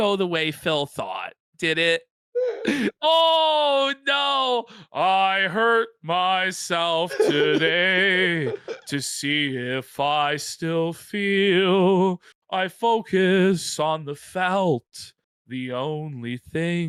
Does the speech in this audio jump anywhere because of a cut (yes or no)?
no